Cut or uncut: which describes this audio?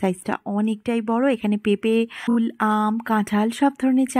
cut